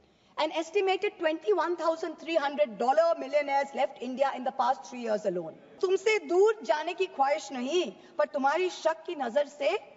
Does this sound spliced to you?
yes; 1 cut; at 5.7 s

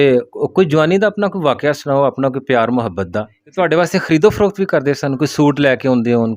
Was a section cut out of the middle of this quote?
yes; 1 cut; at 3.4 s

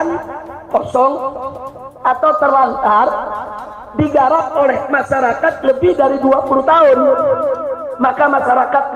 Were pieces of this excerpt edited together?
no; 0 cuts

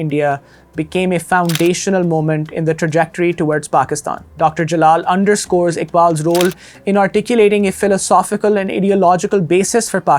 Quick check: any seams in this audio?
no; 0 cuts

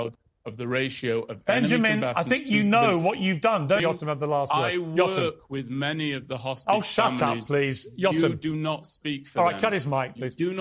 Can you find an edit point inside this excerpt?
yes; 1 cut; at 3.8 s

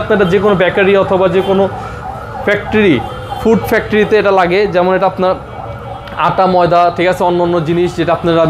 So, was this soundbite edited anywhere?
no; 0 cuts

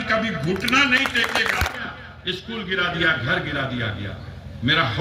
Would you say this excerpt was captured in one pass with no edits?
no; 1 cut; at 1.8 s

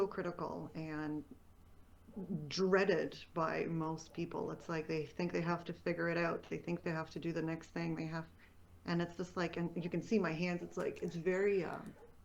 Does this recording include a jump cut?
no; 0 cuts

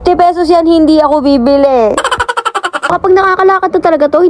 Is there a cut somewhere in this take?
yes; 1 cut; at 3.0 s

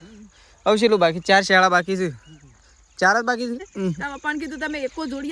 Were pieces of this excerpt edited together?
yes; 1 cut; at 3.7 s

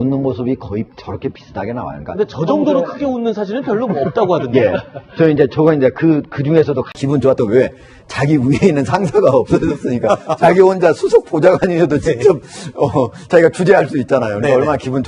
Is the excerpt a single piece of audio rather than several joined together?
yes; 0 cuts

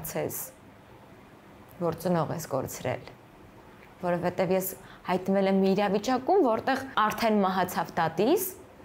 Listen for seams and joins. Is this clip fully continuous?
no; 1 cut; at 6.9 s

